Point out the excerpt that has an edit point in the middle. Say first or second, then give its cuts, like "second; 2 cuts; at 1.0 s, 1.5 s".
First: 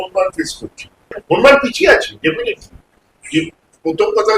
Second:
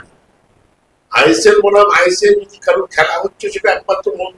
first; 1 cut; at 1.1 s